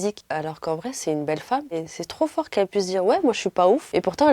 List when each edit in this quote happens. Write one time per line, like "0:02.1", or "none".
0:01.8